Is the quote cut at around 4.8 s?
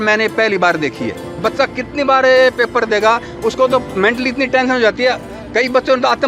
no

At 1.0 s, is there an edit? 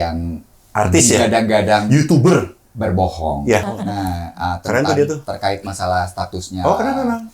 no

